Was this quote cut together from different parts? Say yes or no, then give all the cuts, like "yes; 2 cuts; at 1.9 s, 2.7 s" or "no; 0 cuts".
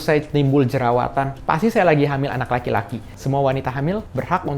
yes; 1 cut; at 3.2 s